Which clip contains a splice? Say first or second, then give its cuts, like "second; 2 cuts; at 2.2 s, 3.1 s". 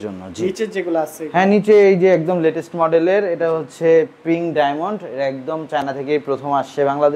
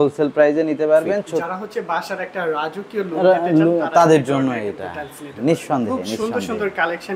second; 1 cut; at 1.5 s